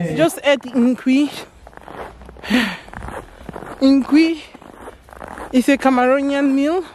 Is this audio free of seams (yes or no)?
yes